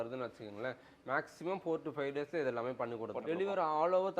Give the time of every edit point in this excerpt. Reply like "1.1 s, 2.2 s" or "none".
3.2 s